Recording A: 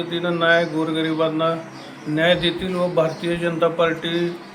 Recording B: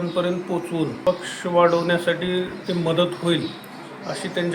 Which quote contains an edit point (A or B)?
B